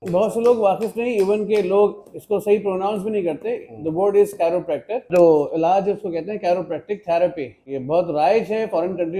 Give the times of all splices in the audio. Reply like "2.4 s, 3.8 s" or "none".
5.1 s, 7.7 s